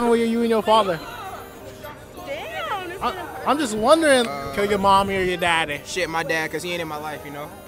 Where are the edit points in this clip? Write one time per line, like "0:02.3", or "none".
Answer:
0:04.3